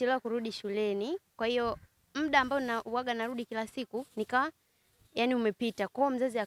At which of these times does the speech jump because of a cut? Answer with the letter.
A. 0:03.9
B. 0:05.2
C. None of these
C